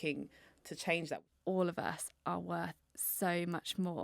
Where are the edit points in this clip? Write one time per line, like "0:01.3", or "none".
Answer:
0:01.3